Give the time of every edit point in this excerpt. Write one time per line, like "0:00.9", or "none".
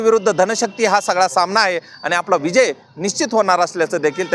none